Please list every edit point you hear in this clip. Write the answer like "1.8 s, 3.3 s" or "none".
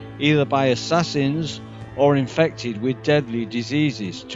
2.6 s